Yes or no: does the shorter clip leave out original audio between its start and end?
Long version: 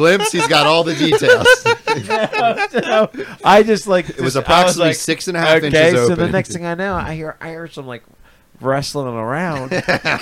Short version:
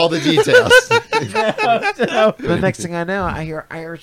yes